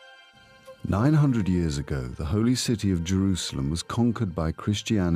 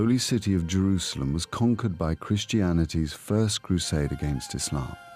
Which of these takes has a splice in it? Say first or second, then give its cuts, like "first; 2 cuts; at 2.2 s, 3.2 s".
second; 1 cut; at 4.2 s